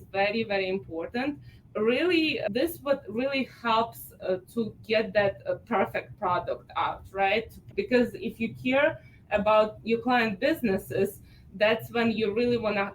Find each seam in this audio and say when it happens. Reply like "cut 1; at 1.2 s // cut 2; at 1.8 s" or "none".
cut 1; at 1.5 s // cut 2; at 2.4 s // cut 3; at 7.6 s